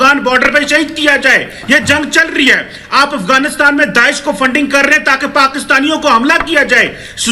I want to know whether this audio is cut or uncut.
uncut